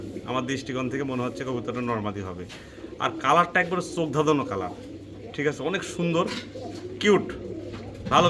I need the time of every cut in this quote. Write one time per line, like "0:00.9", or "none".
none